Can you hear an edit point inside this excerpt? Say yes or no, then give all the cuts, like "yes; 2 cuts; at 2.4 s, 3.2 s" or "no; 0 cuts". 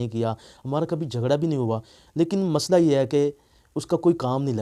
no; 0 cuts